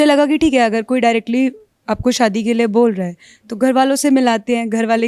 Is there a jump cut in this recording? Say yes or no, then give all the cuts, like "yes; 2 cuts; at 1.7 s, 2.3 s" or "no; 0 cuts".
no; 0 cuts